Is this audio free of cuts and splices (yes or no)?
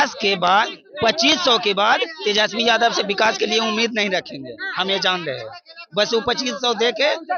yes